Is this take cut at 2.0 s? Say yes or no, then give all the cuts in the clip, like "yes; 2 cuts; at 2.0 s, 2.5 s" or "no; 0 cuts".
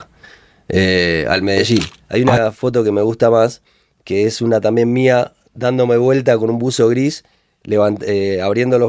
yes; 1 cut; at 2.0 s